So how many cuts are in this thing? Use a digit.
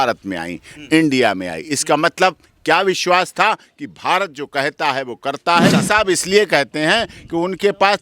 1